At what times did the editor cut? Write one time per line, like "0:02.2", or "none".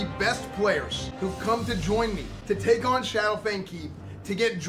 0:01.0
0:02.3